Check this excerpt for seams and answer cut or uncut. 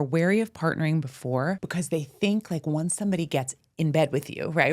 cut